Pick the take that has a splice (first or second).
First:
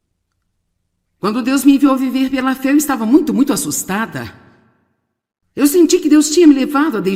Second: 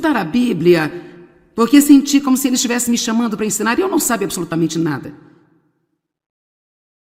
first